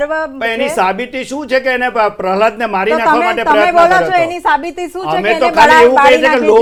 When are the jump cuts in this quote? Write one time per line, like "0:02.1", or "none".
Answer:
none